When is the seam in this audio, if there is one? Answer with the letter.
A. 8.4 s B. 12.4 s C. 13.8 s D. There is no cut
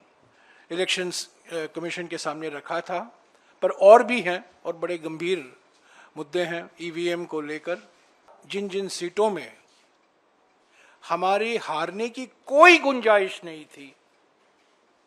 A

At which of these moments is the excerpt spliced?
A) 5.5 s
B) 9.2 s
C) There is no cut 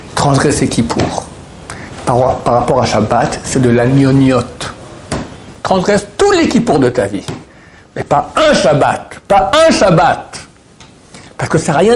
A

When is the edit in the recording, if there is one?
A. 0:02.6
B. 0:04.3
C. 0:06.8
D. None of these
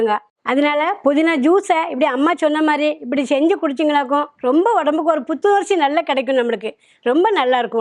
D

